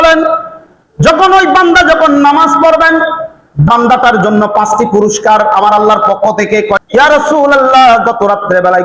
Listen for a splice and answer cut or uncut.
cut